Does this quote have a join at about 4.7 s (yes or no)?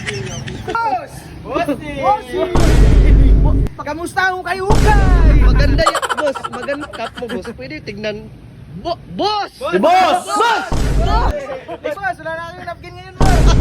no